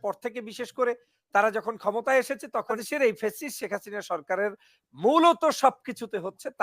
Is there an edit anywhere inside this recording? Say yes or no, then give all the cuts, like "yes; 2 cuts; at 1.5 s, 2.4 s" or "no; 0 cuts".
yes; 1 cut; at 2.8 s